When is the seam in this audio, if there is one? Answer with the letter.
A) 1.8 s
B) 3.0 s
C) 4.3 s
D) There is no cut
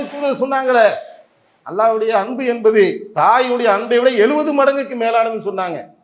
B